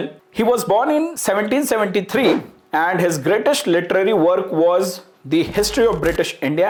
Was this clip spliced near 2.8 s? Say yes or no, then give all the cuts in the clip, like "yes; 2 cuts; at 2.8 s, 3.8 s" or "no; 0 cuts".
no; 0 cuts